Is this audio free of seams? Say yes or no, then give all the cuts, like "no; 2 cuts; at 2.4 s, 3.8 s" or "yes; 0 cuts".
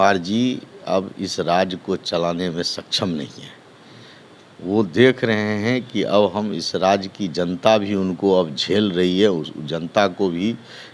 yes; 0 cuts